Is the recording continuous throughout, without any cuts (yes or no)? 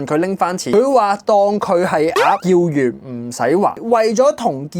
no